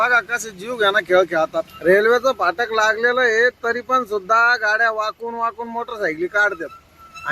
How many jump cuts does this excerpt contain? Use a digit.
1